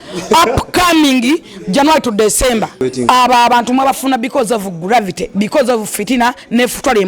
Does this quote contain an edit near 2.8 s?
yes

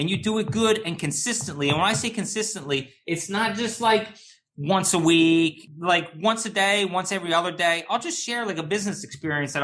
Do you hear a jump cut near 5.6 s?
yes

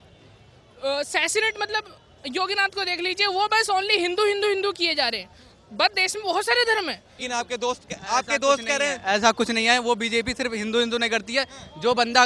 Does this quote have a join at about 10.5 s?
no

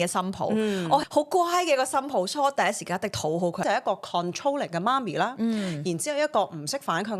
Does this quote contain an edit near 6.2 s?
no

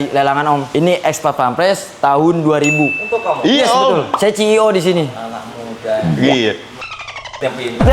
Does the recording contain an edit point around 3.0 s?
yes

